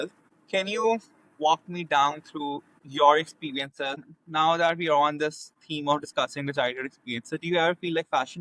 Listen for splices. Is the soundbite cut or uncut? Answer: cut